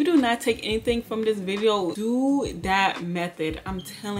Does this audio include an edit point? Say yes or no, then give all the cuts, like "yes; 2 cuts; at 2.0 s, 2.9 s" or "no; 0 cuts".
yes; 1 cut; at 2.0 s